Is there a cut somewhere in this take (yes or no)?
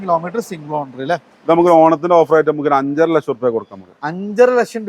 no